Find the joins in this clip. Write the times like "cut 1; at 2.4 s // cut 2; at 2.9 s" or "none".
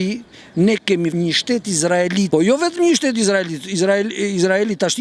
cut 1; at 1.1 s // cut 2; at 2.3 s